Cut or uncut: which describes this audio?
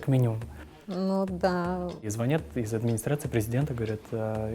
cut